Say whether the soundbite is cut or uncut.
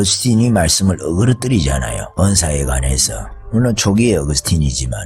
cut